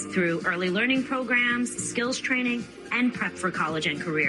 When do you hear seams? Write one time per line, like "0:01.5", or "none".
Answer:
none